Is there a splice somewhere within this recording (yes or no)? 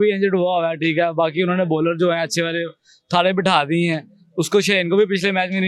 no